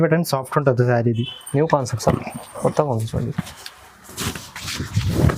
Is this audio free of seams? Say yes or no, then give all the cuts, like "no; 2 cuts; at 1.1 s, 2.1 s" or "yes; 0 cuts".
yes; 0 cuts